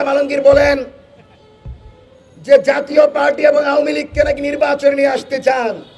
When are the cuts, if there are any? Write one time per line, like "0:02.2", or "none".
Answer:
none